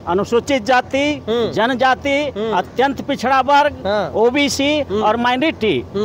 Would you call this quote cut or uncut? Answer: uncut